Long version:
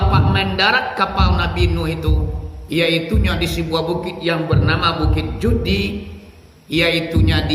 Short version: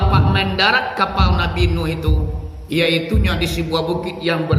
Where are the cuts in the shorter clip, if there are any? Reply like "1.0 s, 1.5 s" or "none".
none